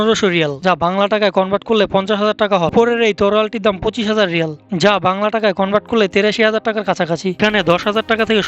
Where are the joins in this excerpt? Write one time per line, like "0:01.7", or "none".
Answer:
0:02.7
0:07.4